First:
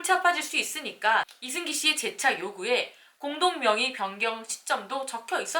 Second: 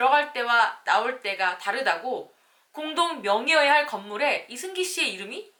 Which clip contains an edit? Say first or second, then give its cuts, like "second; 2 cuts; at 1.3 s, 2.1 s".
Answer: first; 1 cut; at 1.4 s